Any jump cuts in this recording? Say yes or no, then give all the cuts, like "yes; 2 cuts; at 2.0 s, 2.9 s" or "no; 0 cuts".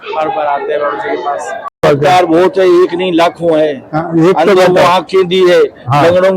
yes; 1 cut; at 1.8 s